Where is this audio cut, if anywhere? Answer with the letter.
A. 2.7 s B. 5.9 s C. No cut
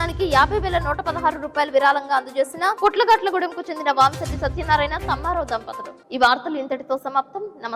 C